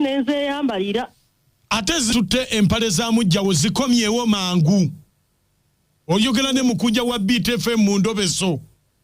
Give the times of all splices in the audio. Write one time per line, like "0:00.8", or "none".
0:02.1